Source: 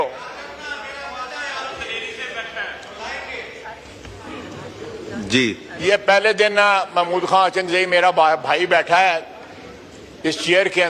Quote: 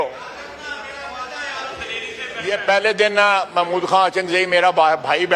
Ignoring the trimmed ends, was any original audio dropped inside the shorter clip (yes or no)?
yes